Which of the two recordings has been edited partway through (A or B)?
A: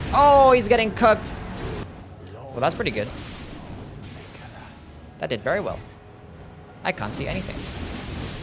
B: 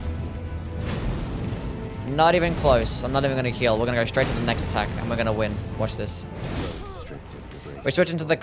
A